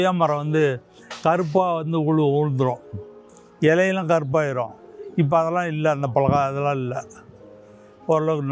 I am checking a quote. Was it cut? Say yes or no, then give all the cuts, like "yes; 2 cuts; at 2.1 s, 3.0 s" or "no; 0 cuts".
no; 0 cuts